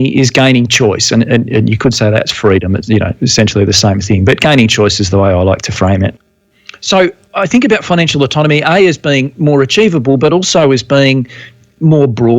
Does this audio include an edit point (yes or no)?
yes